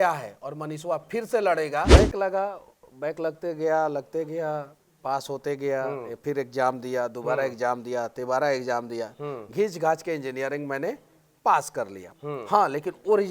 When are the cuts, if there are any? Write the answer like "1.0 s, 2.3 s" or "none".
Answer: 1.9 s